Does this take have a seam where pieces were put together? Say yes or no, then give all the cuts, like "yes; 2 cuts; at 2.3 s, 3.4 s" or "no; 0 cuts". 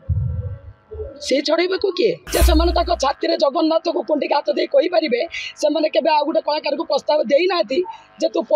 yes; 1 cut; at 2.2 s